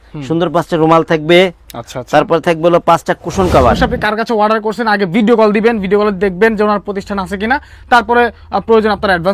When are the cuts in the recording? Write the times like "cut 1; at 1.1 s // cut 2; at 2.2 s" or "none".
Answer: cut 1; at 3.8 s